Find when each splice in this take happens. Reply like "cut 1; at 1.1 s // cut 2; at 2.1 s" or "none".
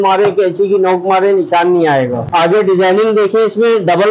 cut 1; at 2.2 s